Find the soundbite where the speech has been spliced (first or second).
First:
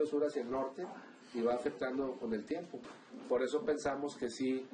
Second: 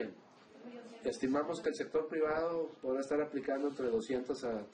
first